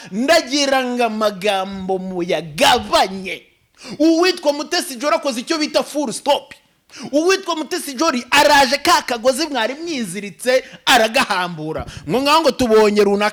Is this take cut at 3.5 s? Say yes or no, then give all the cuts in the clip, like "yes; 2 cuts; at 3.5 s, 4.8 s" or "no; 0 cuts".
no; 0 cuts